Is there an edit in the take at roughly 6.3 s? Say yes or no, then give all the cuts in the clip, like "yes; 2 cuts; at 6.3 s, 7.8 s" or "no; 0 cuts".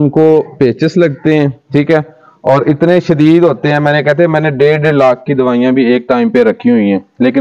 no; 0 cuts